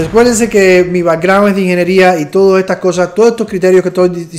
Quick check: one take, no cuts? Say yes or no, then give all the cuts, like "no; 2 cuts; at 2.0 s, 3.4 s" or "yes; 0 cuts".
yes; 0 cuts